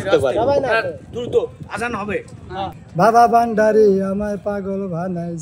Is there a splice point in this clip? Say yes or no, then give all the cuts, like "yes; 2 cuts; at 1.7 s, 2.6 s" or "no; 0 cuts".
yes; 1 cut; at 2.7 s